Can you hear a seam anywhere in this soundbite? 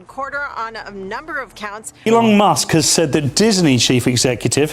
yes; 1 cut; at 1.9 s

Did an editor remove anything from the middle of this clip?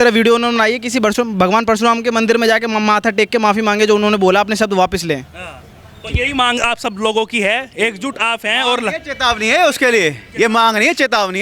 no; 0 cuts

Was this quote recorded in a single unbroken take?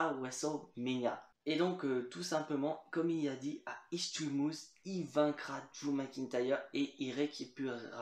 yes; 0 cuts

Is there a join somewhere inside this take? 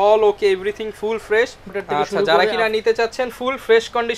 yes; 1 cut; at 1.7 s

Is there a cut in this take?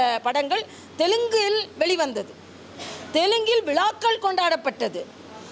no; 0 cuts

